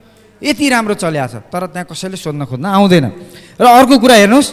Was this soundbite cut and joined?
no; 0 cuts

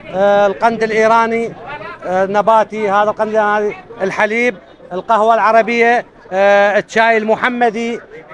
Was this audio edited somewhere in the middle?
no; 0 cuts

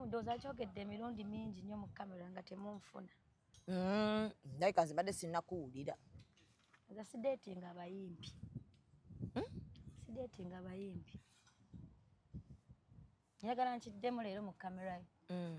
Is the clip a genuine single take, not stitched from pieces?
yes; 0 cuts

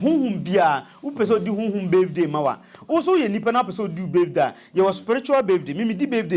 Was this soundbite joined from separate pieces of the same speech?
no; 0 cuts

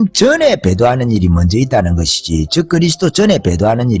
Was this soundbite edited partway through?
no; 0 cuts

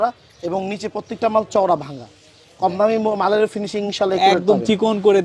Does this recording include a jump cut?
no; 0 cuts

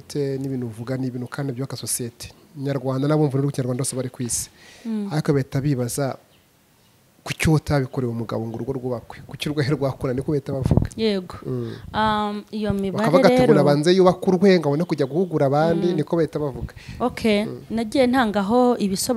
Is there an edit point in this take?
no; 0 cuts

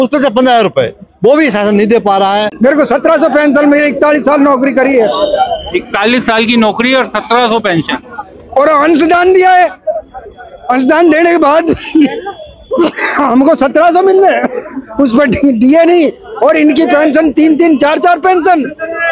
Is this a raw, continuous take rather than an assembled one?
no; 1 cut; at 2.5 s

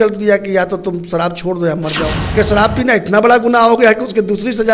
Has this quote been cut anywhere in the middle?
yes; 1 cut; at 2.2 s

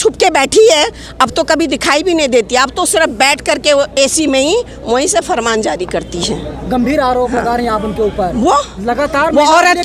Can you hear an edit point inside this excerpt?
no; 0 cuts

